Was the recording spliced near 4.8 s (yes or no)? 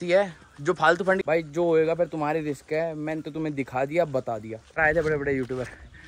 yes